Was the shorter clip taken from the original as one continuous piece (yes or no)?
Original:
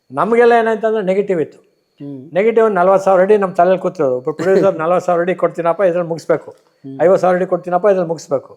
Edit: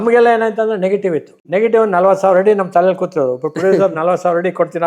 no